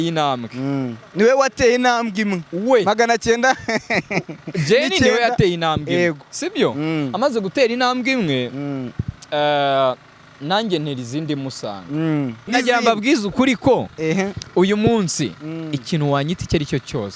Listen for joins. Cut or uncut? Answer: cut